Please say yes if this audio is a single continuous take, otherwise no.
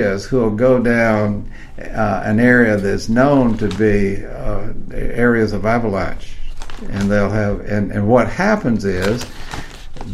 yes